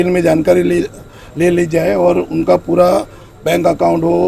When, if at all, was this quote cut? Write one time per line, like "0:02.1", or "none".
none